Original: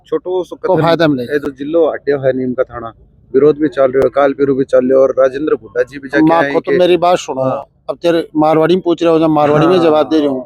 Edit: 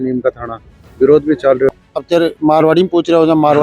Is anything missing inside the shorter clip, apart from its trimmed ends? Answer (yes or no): yes